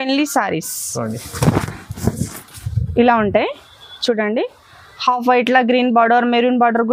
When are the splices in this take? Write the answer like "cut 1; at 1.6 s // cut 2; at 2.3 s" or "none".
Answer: none

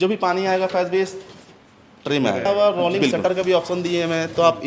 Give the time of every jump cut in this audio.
none

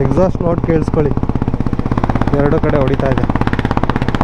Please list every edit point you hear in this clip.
none

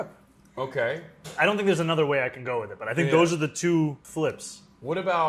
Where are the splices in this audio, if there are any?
cut 1; at 4.0 s

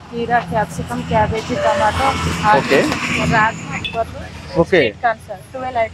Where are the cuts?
cut 1; at 3.7 s

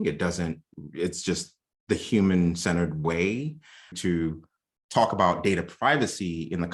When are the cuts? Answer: cut 1; at 4.0 s

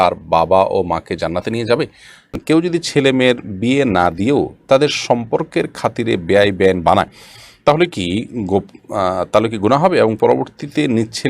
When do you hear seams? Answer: cut 1; at 2.4 s

